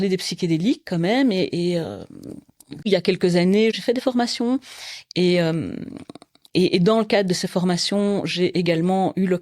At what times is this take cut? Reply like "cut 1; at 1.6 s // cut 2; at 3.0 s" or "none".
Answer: cut 1; at 2.9 s // cut 2; at 3.8 s